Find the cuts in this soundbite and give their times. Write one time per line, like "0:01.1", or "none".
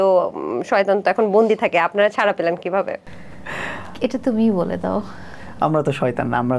none